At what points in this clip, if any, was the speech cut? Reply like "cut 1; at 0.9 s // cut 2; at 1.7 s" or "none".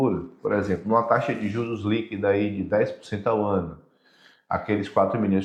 none